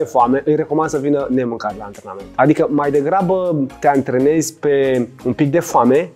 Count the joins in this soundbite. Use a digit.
2